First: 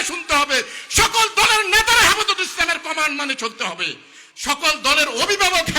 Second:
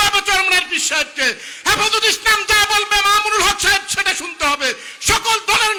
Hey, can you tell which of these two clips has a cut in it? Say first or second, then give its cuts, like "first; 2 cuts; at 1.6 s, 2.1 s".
first; 1 cut; at 4.2 s